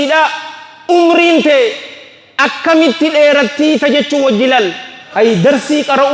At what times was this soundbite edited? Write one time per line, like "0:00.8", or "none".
0:05.0